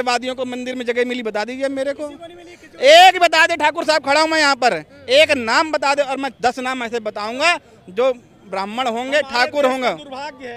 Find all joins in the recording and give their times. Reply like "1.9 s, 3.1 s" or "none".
none